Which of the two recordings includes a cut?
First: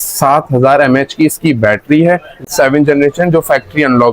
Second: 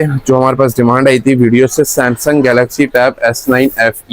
first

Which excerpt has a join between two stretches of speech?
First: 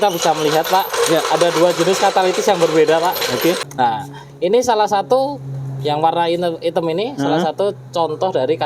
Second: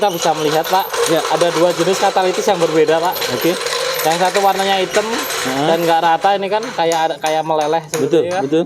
first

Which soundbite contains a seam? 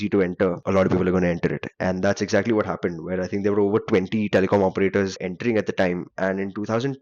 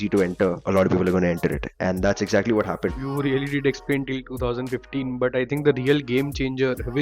second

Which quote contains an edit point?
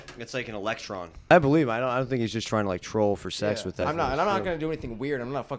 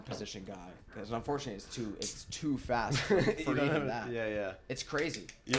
first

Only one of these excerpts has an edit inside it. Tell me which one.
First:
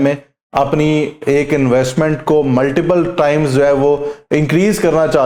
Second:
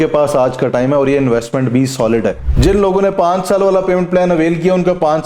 second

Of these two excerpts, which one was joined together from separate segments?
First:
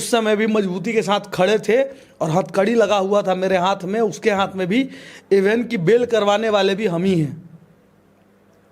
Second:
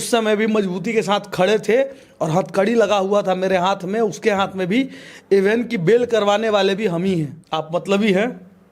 second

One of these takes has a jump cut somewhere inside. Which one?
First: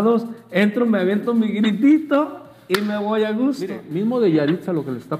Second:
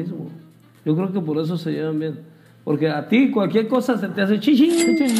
first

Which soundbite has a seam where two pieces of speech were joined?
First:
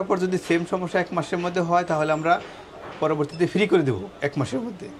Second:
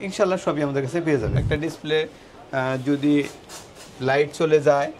second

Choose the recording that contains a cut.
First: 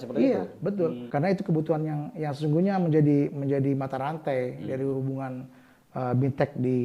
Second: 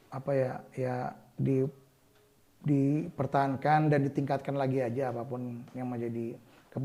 first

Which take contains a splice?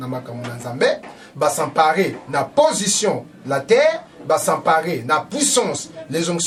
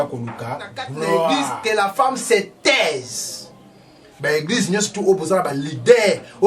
second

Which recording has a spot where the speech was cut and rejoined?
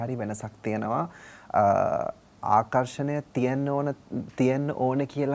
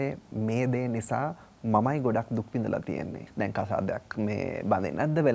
second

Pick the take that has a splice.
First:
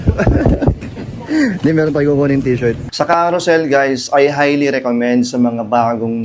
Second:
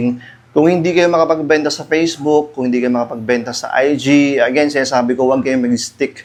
first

